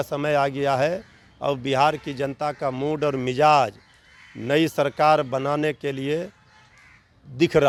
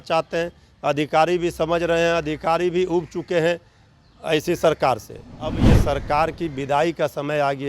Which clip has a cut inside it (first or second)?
second